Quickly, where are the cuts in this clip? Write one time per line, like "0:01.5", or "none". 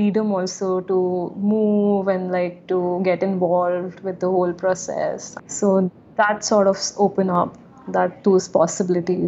none